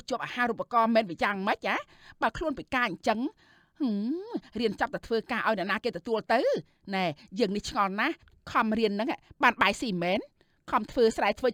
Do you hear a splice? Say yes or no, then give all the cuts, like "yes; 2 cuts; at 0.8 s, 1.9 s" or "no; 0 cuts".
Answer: no; 0 cuts